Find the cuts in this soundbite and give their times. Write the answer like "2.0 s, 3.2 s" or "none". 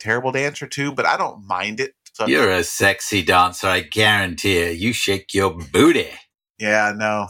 2.0 s